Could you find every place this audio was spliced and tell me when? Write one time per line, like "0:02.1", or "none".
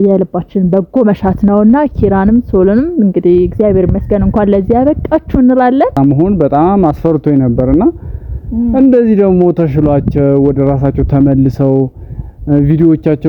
0:05.9

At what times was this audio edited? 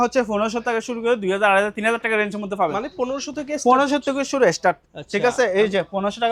none

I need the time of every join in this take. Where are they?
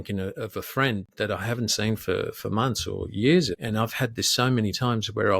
0:03.5

